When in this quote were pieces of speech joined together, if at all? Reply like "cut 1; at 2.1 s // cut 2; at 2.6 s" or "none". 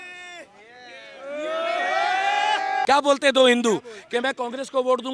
cut 1; at 2.8 s